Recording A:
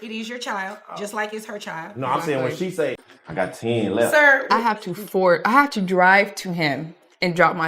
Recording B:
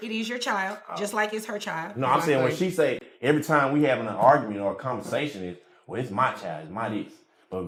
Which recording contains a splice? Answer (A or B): A